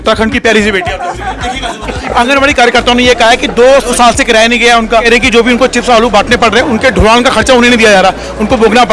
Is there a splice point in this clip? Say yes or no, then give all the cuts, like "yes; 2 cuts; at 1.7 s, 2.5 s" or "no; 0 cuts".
yes; 3 cuts; at 2.0 s, 3.9 s, 5.0 s